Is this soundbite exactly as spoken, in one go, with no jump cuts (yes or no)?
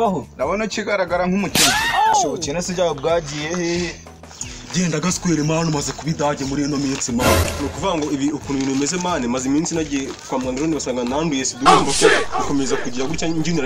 yes